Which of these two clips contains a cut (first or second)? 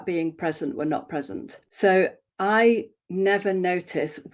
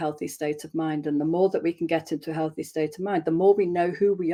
first